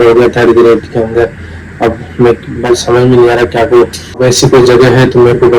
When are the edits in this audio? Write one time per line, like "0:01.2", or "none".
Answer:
0:04.2